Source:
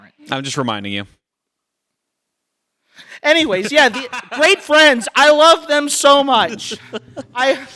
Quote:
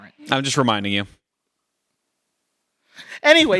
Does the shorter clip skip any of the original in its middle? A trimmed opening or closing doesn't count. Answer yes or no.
no